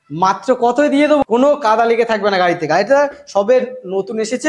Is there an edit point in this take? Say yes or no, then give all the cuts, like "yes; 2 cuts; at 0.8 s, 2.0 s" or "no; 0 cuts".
yes; 1 cut; at 1.2 s